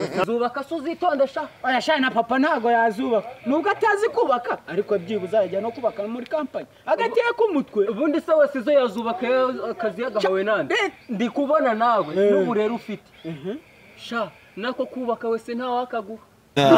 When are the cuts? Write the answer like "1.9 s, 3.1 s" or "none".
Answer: none